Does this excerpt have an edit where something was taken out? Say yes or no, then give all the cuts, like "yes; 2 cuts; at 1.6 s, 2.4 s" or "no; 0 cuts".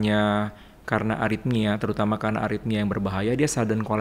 no; 0 cuts